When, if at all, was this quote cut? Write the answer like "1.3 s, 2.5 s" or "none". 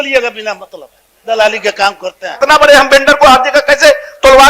2.4 s